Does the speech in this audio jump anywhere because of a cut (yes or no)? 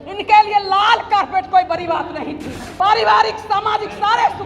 yes